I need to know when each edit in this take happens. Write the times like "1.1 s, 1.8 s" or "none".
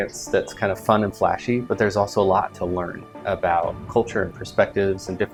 none